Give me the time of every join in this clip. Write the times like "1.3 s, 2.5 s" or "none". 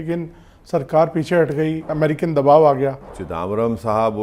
1.9 s, 3.2 s